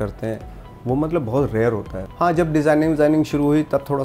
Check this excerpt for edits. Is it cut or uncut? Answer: cut